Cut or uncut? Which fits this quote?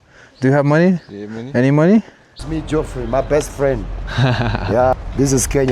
cut